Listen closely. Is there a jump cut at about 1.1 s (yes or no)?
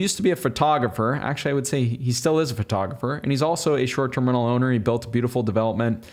no